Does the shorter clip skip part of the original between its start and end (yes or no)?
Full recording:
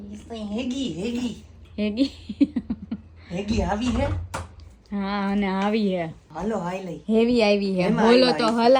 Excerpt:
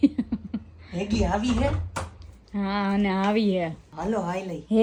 no